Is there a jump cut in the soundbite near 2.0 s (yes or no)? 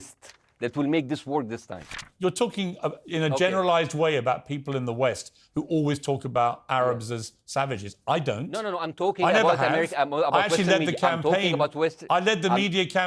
no